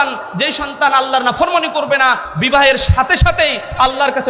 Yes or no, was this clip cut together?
yes